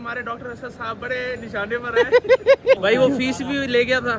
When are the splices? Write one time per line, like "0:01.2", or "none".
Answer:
0:02.8